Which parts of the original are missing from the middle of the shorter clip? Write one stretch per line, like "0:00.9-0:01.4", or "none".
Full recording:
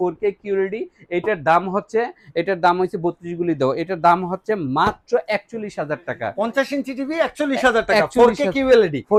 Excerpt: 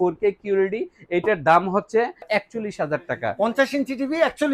0:02.3-0:05.2